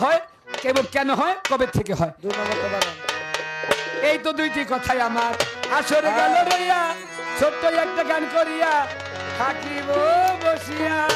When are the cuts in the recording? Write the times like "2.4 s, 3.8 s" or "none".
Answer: none